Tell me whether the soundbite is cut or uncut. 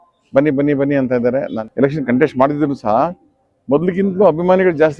cut